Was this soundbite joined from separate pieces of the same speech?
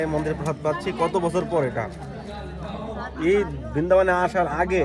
no; 0 cuts

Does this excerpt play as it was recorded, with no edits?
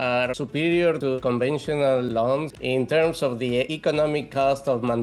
no; 3 cuts; at 1.2 s, 2.5 s, 3.7 s

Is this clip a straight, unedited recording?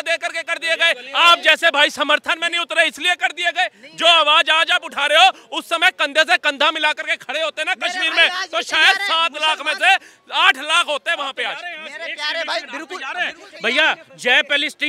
yes; 0 cuts

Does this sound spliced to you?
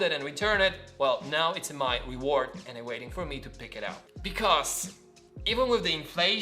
yes; 1 cut; at 4.1 s

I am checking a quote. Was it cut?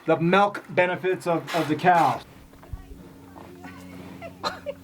yes; 1 cut; at 2.2 s

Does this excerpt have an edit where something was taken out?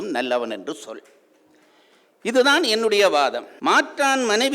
yes; 1 cut; at 3.5 s

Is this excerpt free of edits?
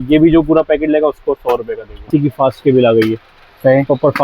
no; 1 cut; at 2.0 s

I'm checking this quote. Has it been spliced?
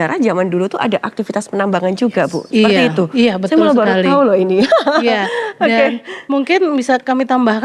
no; 0 cuts

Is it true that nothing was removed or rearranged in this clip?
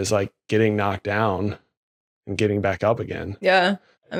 yes; 0 cuts

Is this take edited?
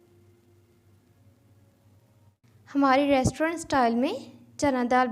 yes; 1 cut; at 2.4 s

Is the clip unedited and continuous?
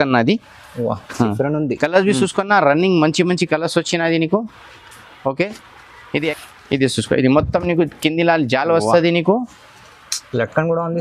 no; 1 cut; at 6.3 s

